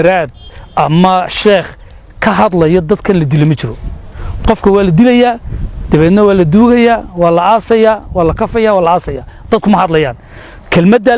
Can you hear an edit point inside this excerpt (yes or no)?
no